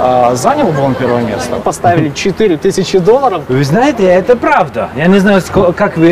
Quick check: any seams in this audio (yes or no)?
yes